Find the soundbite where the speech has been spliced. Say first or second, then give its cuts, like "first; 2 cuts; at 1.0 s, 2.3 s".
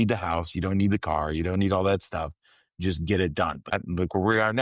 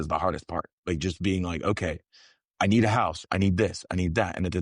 first; 1 cut; at 3.6 s